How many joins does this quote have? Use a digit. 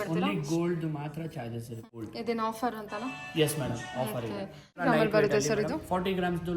2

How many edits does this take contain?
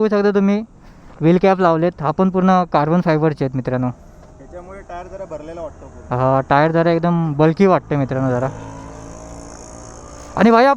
0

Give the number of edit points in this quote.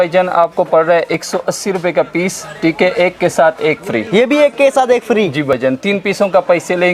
0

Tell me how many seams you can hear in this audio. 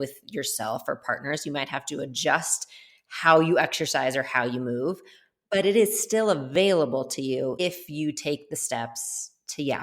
1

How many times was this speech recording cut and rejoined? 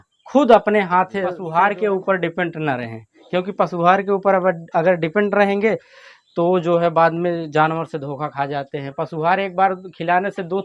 1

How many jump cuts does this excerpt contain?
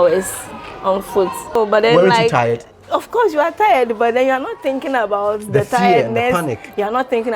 1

